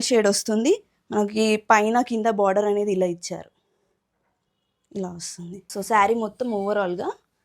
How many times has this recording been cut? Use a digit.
1